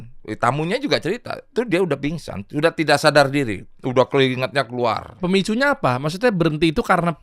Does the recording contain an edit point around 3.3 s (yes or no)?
no